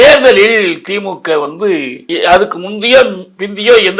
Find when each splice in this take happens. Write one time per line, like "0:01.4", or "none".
0:02.0